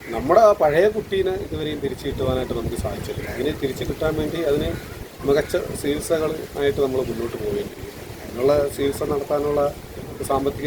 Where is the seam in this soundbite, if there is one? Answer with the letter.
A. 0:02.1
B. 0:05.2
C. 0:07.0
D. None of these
D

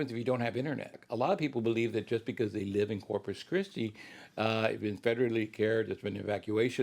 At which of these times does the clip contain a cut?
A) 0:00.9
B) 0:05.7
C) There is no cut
A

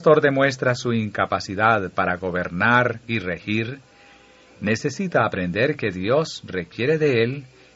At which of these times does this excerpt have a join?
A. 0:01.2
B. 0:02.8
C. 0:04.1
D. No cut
D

